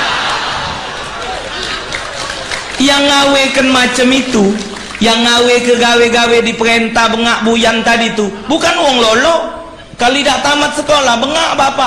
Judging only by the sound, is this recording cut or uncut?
uncut